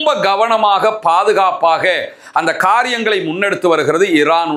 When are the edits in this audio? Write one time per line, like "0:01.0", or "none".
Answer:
none